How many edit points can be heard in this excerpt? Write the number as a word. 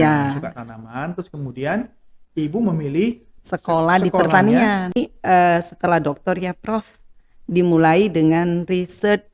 one